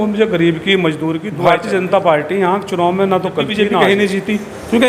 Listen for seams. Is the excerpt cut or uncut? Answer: cut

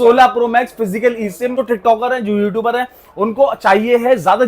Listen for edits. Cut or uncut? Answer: cut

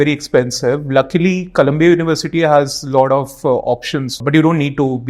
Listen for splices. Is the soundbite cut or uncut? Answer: cut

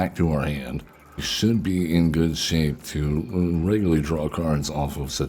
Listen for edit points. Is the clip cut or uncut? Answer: cut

